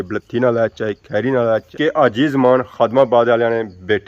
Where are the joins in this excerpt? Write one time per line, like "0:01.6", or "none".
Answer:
0:01.7